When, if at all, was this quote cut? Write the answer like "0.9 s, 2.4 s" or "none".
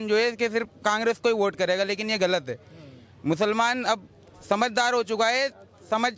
none